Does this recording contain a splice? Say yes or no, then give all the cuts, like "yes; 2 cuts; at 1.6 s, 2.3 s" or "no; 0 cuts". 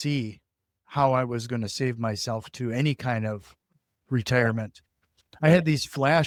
no; 0 cuts